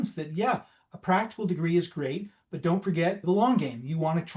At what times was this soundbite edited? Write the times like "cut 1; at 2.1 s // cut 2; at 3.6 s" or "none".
none